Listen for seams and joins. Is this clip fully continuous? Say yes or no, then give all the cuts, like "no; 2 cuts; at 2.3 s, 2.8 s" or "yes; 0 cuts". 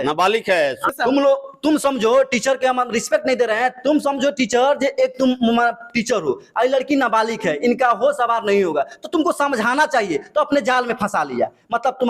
no; 1 cut; at 0.9 s